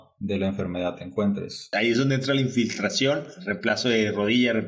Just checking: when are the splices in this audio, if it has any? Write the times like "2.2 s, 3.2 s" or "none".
1.6 s, 3.4 s